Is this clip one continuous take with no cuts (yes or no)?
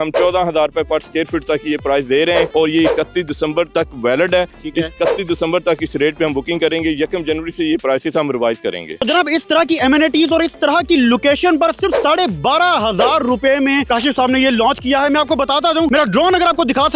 yes